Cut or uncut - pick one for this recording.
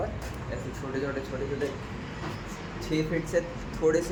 uncut